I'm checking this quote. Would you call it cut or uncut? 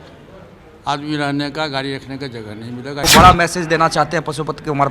cut